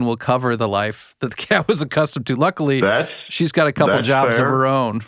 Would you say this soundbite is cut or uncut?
uncut